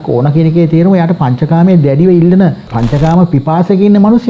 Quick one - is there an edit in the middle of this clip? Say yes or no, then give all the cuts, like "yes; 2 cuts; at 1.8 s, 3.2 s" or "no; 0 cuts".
yes; 1 cut; at 2.7 s